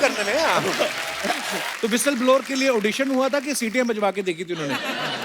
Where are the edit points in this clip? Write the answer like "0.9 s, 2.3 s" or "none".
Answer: 1.7 s